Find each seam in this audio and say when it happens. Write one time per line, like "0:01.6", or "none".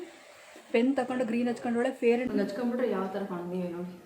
0:02.3

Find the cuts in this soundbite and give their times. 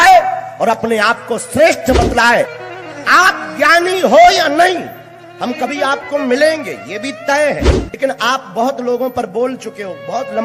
0:02.6
0:07.8

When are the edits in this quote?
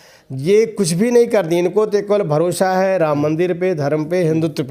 none

